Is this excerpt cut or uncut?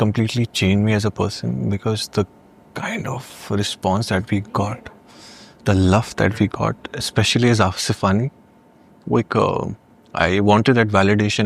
uncut